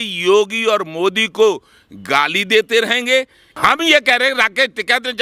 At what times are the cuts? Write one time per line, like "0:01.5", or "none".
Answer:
0:03.4